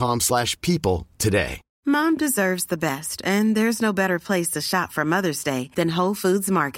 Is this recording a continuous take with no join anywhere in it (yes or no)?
no